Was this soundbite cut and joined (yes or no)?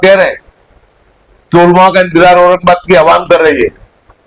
no